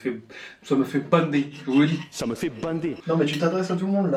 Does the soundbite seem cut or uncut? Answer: uncut